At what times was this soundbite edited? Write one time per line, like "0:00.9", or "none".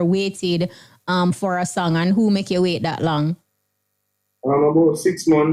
none